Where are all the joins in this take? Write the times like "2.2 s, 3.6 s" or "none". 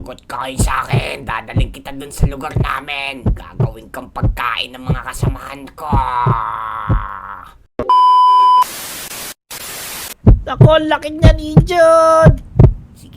7.5 s, 10.2 s